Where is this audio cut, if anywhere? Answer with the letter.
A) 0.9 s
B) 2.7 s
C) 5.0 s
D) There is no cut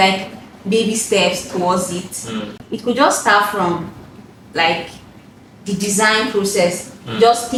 D